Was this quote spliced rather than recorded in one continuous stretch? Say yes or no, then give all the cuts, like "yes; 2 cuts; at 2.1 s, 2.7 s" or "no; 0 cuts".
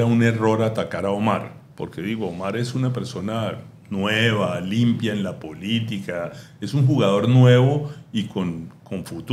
no; 0 cuts